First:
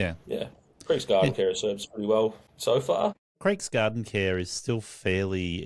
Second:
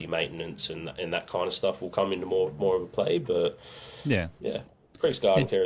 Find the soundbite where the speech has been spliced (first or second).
first